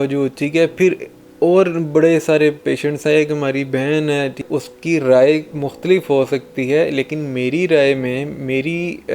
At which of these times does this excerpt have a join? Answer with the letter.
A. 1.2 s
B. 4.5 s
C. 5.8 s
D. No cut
B